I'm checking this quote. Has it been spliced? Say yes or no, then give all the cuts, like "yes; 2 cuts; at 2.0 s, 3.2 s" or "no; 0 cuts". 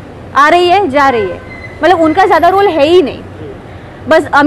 no; 0 cuts